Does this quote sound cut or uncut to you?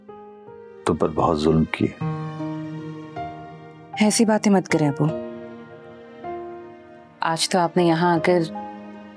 uncut